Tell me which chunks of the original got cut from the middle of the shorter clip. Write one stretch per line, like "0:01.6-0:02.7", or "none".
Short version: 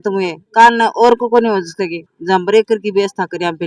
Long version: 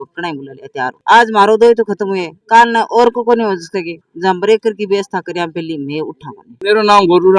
none